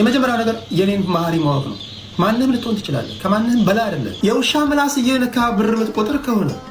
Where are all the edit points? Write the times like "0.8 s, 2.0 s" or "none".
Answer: 4.1 s